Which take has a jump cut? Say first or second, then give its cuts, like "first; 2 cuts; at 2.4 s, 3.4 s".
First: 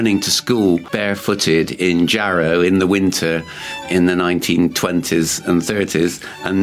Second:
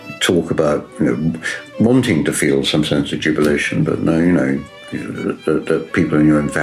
first; 1 cut; at 0.9 s